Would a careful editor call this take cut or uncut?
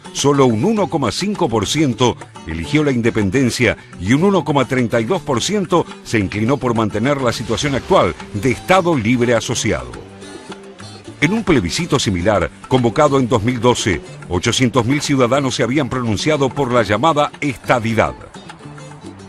uncut